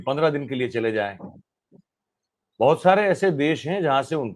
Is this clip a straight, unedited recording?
yes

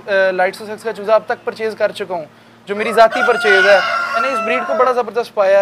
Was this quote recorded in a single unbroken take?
no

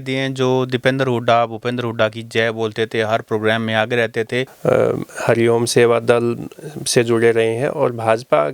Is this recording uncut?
no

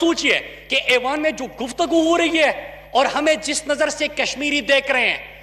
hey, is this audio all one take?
yes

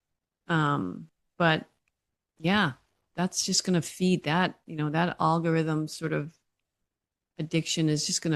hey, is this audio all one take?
yes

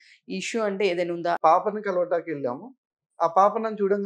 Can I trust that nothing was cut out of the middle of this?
no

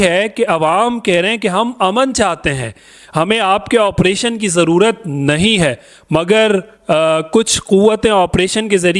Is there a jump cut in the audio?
no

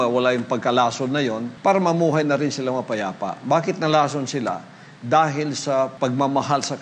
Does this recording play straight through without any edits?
no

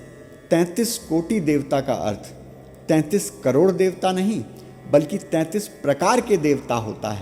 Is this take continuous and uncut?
yes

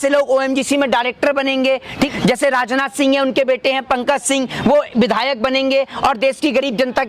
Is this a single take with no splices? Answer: no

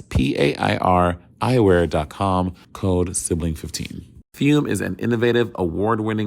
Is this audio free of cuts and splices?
no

